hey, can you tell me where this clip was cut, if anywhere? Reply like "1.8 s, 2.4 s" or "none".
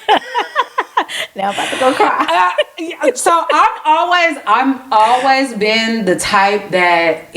none